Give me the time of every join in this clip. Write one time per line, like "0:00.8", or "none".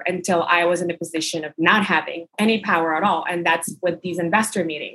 0:02.3